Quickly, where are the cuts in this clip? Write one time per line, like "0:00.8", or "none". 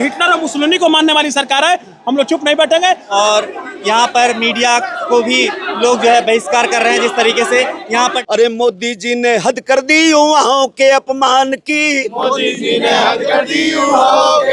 0:03.0
0:08.2